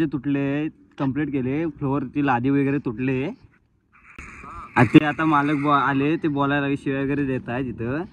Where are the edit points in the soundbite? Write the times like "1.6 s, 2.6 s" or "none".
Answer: none